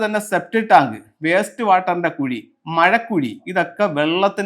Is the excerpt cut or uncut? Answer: cut